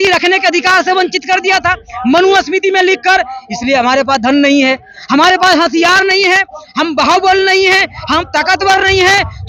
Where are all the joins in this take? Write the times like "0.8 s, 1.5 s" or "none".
none